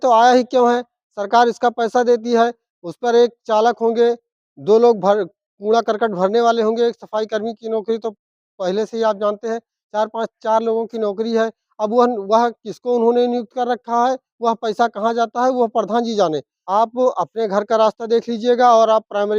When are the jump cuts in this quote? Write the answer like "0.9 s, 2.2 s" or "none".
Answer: 16.5 s